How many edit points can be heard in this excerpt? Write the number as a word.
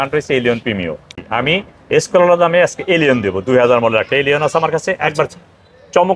one